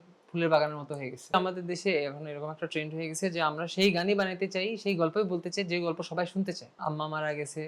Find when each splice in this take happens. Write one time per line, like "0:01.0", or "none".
0:01.3
0:06.8